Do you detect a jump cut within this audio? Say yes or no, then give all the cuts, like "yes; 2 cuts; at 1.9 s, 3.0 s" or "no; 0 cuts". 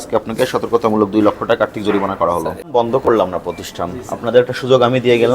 yes; 1 cut; at 2.6 s